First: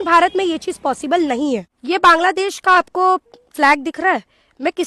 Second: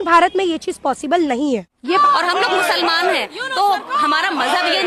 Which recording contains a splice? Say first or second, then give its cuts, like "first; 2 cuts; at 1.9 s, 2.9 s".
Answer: second; 1 cut; at 2.0 s